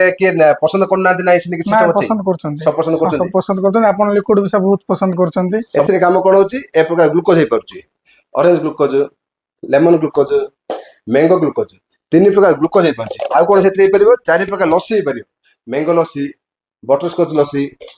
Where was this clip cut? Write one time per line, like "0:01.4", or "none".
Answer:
0:05.7